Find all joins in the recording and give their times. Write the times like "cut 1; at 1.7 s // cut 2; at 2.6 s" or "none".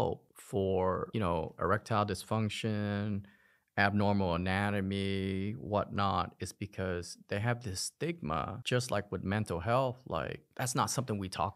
cut 1; at 10.5 s